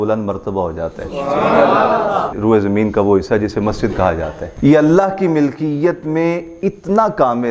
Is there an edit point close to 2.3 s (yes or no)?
yes